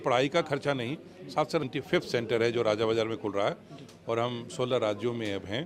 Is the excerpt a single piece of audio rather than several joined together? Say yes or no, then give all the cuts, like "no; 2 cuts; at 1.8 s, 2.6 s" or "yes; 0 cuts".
no; 1 cut; at 1.6 s